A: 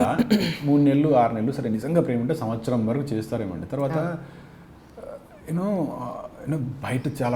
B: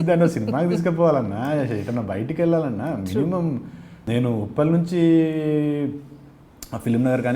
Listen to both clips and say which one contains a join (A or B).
B